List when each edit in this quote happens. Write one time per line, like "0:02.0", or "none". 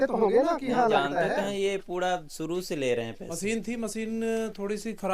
0:03.2